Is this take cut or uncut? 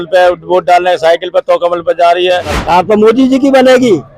cut